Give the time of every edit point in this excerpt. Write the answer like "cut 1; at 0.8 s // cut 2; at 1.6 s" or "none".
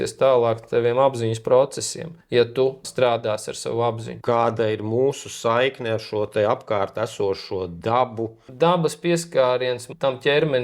cut 1; at 2.8 s // cut 2; at 4.2 s // cut 3; at 8.4 s